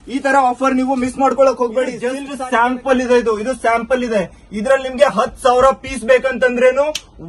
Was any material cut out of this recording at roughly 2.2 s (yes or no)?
yes